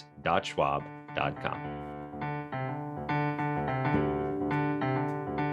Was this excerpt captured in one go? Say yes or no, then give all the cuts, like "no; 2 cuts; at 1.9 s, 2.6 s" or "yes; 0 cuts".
no; 1 cut; at 1.6 s